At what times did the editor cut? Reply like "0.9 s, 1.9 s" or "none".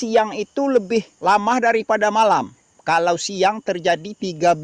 1.1 s